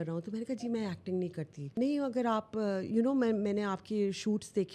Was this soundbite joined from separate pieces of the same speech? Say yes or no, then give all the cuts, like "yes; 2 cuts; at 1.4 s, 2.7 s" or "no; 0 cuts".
yes; 1 cut; at 1.8 s